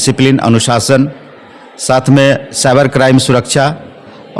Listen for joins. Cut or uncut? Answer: uncut